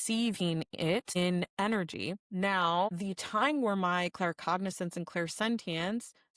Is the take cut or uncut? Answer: cut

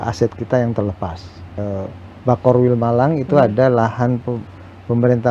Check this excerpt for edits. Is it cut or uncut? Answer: cut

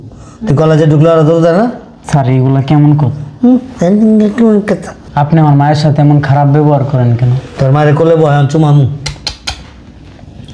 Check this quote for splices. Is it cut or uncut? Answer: cut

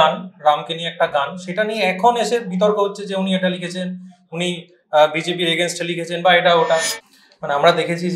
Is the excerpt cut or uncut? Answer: cut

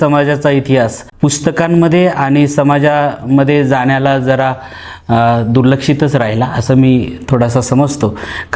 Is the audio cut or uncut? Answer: cut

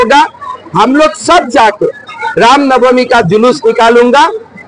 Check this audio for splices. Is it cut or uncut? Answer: uncut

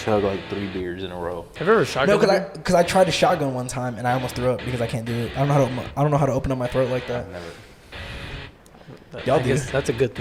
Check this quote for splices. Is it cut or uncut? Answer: uncut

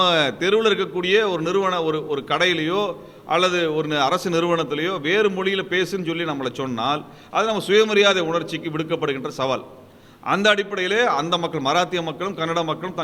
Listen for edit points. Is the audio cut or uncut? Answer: uncut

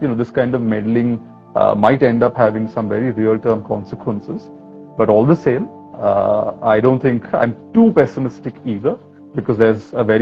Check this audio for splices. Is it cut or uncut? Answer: uncut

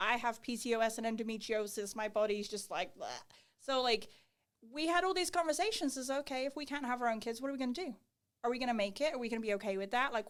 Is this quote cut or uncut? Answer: uncut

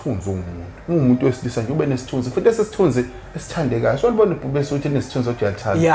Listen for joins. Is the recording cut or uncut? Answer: uncut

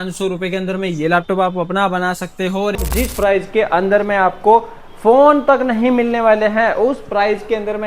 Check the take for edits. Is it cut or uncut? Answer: cut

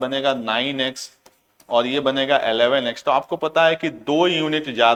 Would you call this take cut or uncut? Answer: uncut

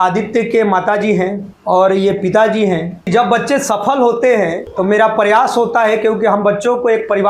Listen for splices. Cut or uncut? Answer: cut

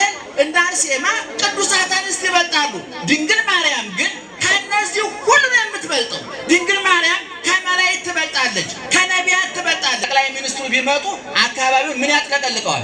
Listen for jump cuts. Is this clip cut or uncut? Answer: cut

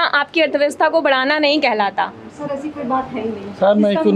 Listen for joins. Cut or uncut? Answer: uncut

